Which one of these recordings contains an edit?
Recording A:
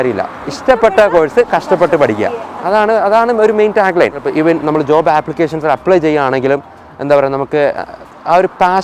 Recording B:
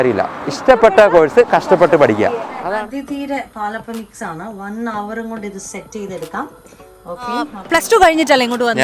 B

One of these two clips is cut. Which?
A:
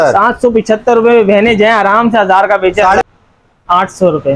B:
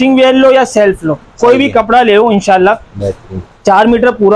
A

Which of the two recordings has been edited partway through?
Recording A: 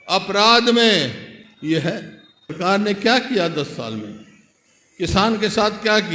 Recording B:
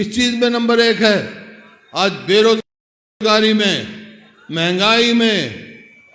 A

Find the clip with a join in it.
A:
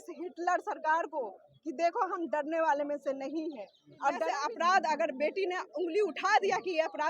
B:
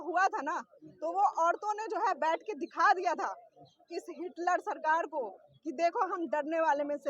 A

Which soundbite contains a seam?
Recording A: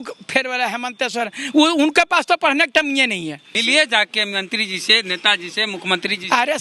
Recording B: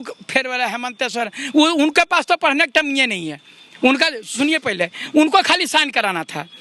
A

